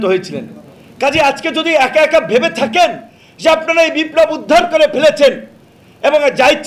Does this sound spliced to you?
no; 0 cuts

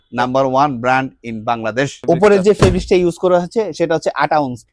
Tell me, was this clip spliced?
yes; 1 cut; at 2.0 s

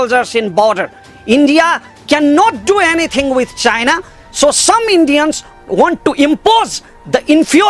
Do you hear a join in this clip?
yes; 1 cut; at 5.5 s

